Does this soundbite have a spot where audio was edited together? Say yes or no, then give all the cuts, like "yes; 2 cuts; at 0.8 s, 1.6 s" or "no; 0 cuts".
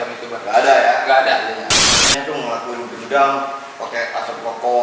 yes; 1 cut; at 1.9 s